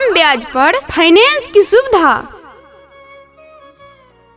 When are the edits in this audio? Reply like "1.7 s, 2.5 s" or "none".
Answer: none